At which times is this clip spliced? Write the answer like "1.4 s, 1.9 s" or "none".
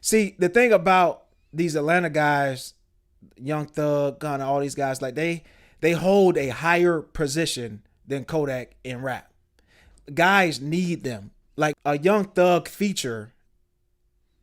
11.7 s